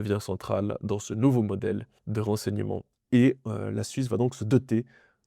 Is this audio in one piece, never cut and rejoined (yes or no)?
no